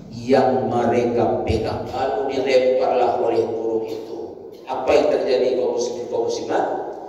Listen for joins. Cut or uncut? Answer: cut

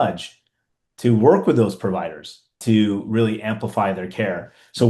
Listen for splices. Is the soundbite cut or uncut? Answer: cut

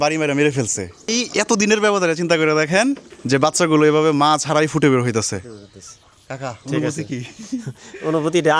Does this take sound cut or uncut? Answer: cut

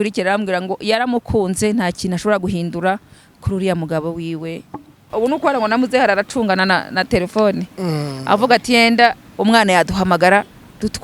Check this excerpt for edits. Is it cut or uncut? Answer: cut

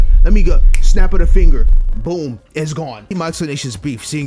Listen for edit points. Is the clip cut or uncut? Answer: cut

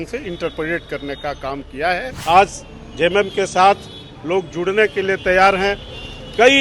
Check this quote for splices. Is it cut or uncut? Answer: cut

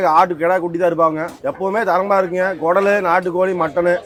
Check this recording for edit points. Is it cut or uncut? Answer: uncut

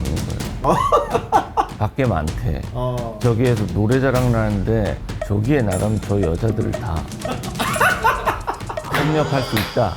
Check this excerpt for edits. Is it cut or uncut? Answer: uncut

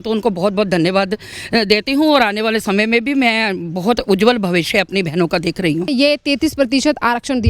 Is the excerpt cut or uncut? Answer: cut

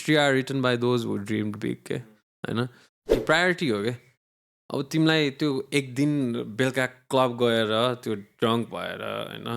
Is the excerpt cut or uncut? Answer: cut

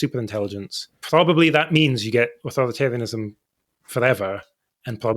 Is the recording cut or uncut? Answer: cut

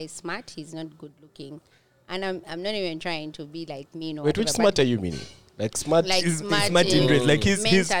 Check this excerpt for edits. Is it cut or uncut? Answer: uncut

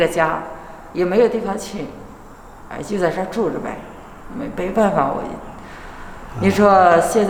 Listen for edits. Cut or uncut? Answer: uncut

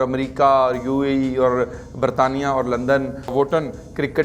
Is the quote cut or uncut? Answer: uncut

